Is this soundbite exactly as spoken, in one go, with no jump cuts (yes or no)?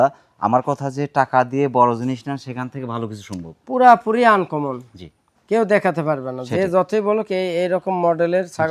yes